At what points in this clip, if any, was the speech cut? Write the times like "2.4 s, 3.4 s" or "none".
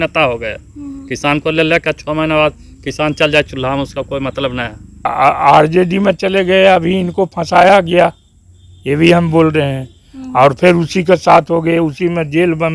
5.1 s